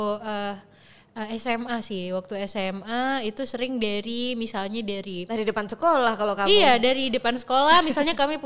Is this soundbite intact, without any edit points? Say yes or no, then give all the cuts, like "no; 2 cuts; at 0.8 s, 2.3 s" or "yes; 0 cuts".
yes; 0 cuts